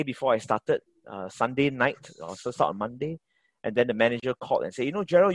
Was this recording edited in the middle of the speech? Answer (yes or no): no